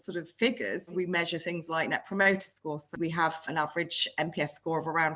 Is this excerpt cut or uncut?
cut